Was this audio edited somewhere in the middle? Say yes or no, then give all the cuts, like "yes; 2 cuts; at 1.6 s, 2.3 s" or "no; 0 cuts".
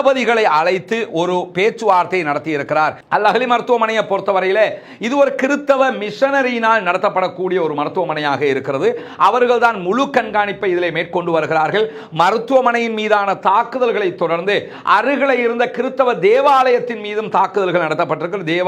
yes; 1 cut; at 3.0 s